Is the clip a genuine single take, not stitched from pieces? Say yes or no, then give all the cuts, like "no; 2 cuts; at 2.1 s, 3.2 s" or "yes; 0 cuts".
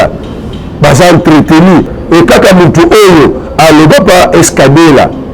no; 1 cut; at 1.9 s